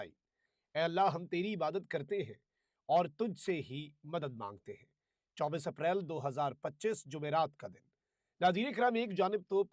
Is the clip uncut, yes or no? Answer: yes